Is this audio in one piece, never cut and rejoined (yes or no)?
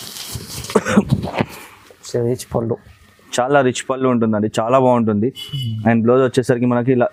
yes